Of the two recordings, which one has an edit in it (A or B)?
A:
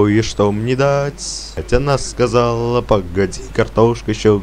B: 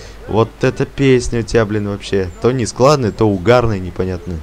A